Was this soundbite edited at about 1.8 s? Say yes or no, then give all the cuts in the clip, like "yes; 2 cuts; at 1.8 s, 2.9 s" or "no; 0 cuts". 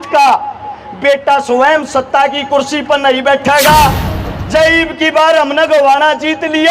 no; 1 cut; at 4.1 s